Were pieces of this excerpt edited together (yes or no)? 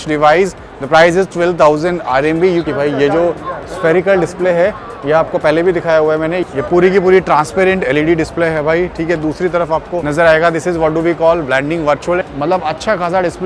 yes